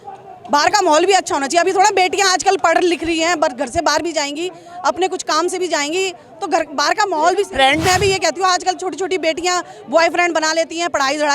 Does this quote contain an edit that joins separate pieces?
yes; 1 cut; at 7.8 s

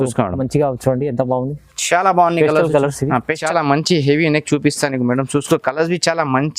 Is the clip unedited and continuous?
no; 1 cut; at 3.4 s

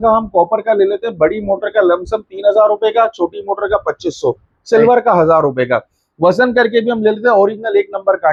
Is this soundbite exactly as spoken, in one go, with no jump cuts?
yes; 0 cuts

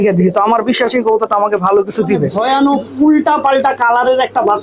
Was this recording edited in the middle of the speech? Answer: yes; 1 cut; at 2.3 s

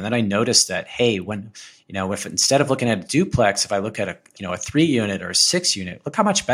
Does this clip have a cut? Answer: yes; 1 cut; at 4.3 s

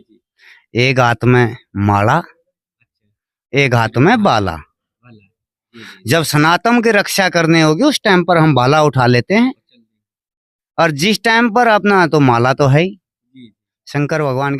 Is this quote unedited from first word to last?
yes; 0 cuts

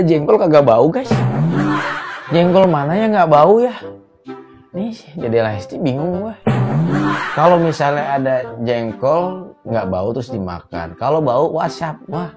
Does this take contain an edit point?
no; 0 cuts

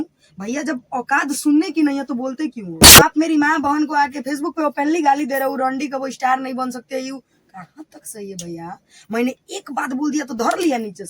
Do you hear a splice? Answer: yes; 1 cut; at 2.8 s

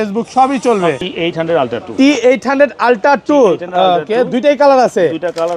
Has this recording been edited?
yes; 1 cut; at 1.1 s

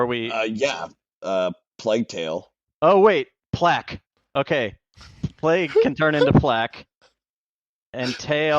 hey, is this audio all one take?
no; 1 cut; at 2.6 s

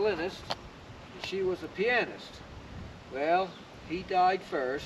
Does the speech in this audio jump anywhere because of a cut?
no; 0 cuts

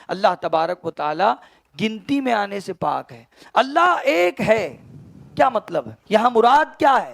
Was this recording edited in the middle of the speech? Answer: yes; 1 cut; at 6.0 s

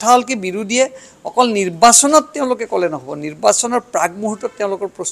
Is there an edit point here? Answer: no; 0 cuts

